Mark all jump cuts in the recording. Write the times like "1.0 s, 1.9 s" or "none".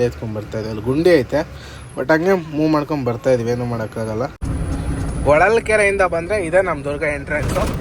4.4 s